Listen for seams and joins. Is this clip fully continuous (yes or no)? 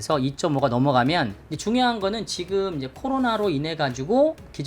no